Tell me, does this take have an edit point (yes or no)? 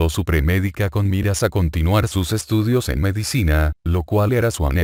no